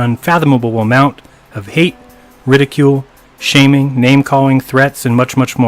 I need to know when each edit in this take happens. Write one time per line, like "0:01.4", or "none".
0:03.9